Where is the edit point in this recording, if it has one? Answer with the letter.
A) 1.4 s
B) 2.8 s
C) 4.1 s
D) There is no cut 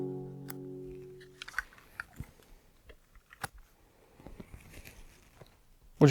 A